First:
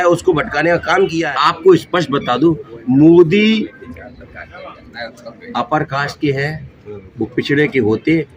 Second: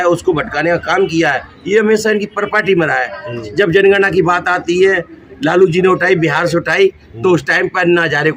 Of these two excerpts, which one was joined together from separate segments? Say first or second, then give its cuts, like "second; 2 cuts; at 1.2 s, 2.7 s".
first; 1 cut; at 1.3 s